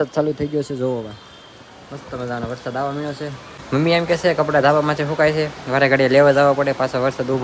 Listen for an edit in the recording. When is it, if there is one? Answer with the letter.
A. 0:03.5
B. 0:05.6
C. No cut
A